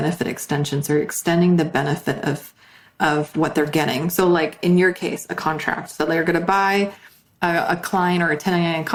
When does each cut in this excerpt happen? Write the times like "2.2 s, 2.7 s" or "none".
none